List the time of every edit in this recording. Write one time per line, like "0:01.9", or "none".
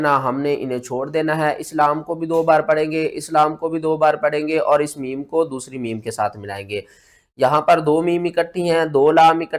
none